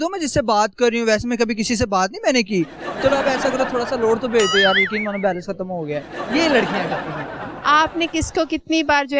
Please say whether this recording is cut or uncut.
uncut